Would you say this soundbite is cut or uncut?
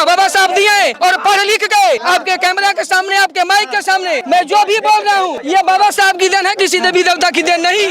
cut